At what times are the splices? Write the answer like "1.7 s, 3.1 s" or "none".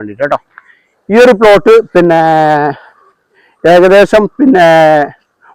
none

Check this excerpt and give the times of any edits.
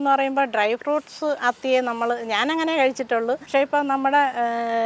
3.4 s

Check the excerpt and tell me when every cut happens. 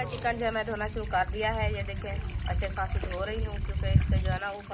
none

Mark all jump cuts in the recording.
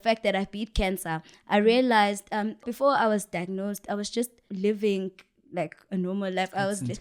2.7 s, 4.4 s

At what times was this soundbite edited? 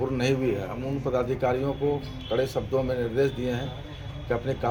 none

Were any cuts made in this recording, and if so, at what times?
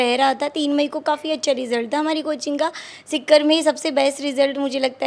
none

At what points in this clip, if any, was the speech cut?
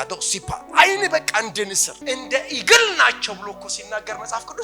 1.9 s

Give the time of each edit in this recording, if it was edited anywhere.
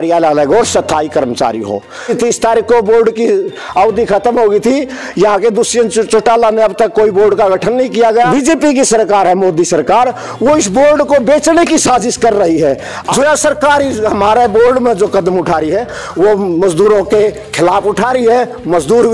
2.1 s, 8.3 s, 13.0 s

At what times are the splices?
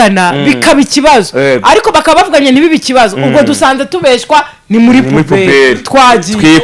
none

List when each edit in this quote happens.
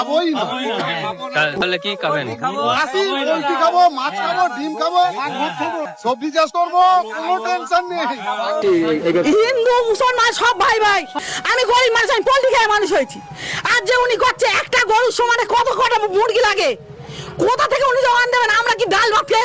1.6 s, 5.9 s, 8.6 s, 11.1 s

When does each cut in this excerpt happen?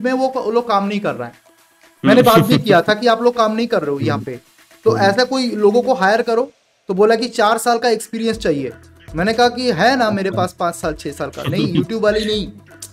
none

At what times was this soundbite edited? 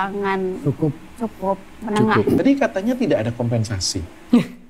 2.4 s

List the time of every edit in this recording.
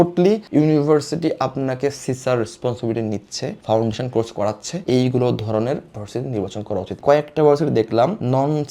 7.0 s

